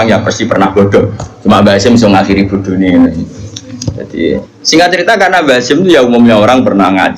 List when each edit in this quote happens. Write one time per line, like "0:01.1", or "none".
0:04.5